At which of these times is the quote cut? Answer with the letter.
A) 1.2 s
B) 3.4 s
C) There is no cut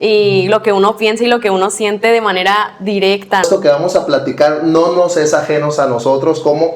B